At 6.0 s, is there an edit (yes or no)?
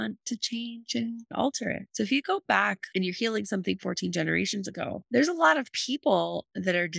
no